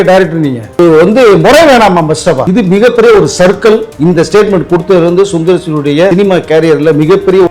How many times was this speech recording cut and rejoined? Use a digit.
4